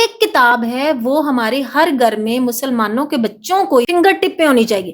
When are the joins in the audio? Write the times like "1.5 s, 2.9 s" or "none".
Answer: 3.9 s

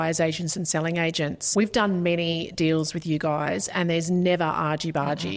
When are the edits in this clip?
1.4 s

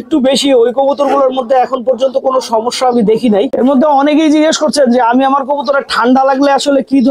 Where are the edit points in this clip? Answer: 3.5 s

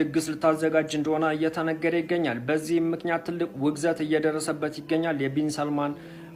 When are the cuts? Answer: none

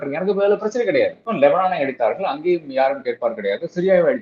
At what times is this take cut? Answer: 1.2 s

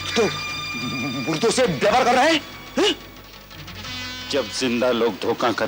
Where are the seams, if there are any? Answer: none

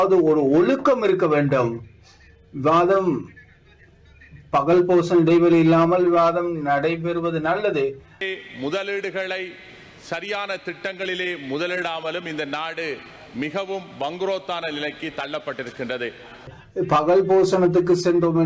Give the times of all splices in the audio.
8.3 s, 16.6 s

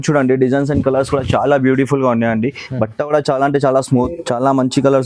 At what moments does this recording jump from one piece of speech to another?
4.1 s

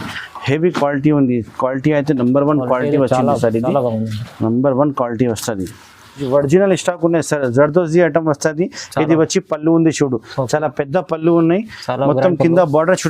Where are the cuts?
6.2 s

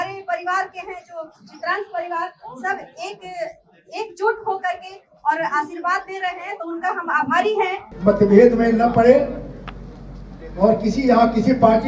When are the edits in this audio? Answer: 7.8 s

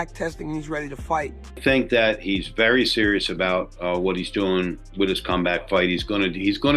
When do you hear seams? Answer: 1.4 s

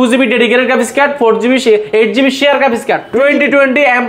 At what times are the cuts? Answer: 3.1 s

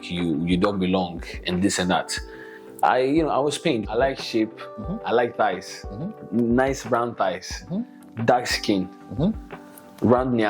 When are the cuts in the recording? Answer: 3.9 s

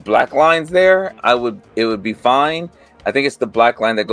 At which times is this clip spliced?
none

